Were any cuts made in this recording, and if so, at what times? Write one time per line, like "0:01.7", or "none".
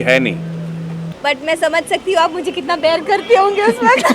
0:01.0